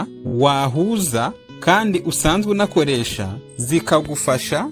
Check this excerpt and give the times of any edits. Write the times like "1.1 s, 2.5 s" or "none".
none

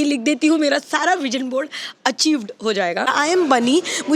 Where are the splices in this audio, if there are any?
3.1 s

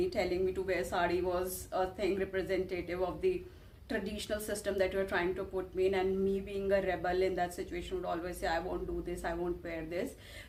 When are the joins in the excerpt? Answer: none

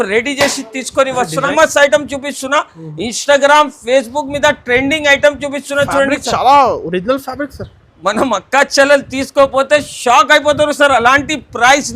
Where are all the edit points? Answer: 1.5 s

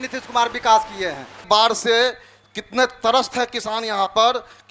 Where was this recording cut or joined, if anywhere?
1.4 s

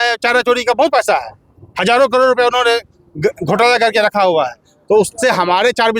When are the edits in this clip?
none

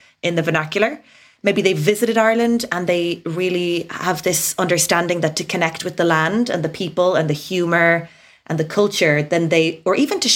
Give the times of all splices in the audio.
none

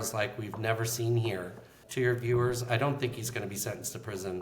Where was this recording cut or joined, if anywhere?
1.8 s

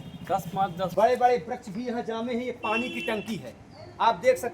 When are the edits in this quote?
0.9 s

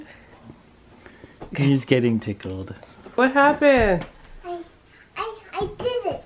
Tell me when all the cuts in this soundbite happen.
3.2 s

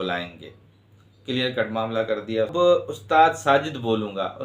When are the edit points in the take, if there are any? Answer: 2.5 s

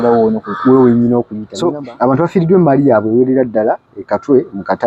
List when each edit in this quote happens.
1.4 s

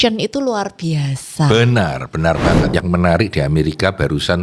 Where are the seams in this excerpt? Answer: 2.7 s

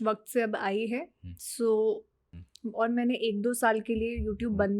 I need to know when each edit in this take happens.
2.4 s

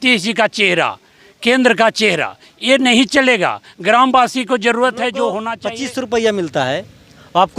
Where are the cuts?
5.6 s

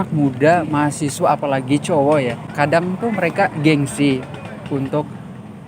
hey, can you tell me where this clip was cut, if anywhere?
2.5 s

